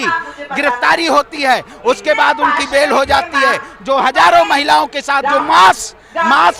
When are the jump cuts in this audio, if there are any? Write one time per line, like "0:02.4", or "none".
none